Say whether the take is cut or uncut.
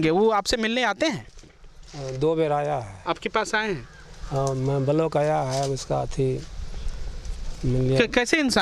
uncut